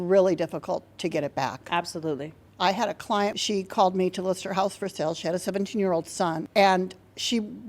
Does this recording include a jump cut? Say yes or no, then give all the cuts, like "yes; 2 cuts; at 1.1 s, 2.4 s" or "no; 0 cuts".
yes; 2 cuts; at 3.4 s, 6.4 s